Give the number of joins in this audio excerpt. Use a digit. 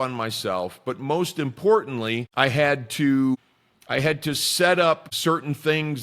3